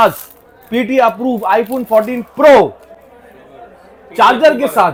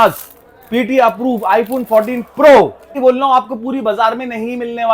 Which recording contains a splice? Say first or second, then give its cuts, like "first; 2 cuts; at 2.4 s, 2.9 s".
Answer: second; 1 cut; at 3.0 s